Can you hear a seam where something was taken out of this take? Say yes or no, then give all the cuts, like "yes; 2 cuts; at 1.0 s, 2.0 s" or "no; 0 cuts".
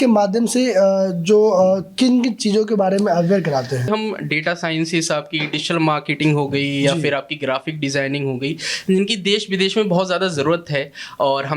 yes; 1 cut; at 3.9 s